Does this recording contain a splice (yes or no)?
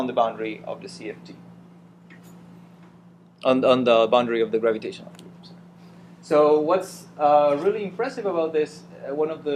no